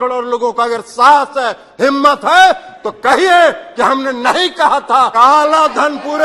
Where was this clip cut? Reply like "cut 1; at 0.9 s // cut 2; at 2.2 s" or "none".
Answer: cut 1; at 5.1 s